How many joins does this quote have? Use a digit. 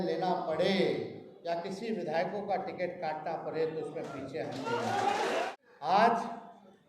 1